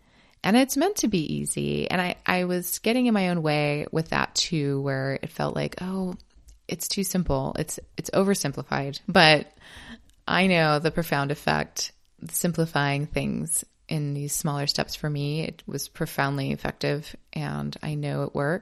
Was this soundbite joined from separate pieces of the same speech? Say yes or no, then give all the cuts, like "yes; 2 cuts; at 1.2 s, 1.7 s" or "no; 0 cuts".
no; 0 cuts